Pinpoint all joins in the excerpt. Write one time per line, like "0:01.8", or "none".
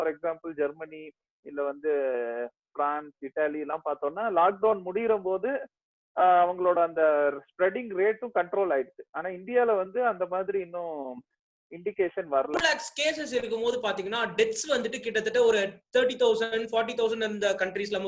0:12.6